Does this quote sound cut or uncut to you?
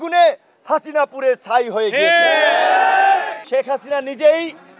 cut